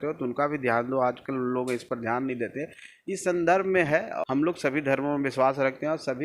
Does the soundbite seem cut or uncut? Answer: cut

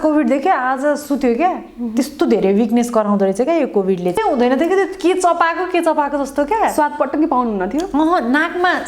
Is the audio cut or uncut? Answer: cut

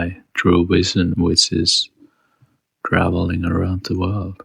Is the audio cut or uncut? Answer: cut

